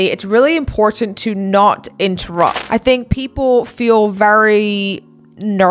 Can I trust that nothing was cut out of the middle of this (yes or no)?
no